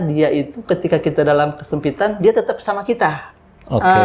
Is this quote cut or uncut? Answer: uncut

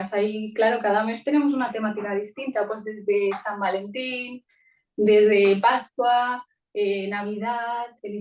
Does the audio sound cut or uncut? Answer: uncut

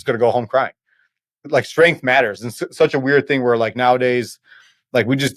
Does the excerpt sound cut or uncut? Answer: cut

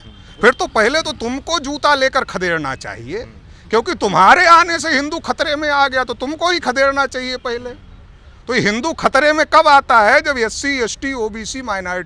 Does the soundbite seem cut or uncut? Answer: uncut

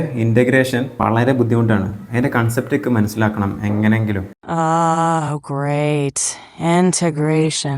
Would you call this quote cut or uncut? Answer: cut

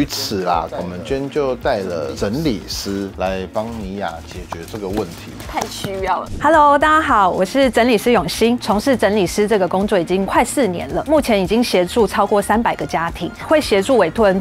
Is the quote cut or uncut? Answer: uncut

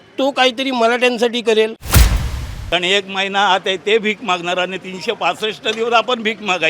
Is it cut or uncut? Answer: cut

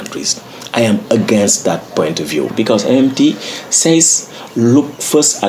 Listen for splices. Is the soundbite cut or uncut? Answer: cut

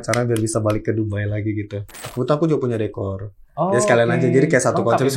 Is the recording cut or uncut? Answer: cut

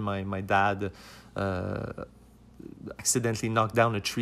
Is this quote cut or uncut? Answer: cut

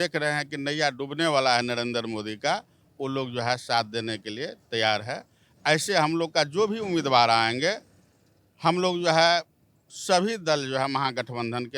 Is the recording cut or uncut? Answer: uncut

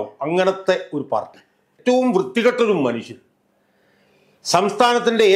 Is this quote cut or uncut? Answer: cut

